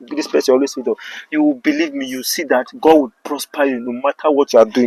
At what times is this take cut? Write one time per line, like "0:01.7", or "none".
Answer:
none